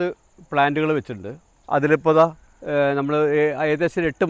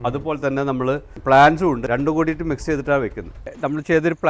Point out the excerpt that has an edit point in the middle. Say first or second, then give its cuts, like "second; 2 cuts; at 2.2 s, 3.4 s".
second; 3 cuts; at 1.1 s, 1.8 s, 3.4 s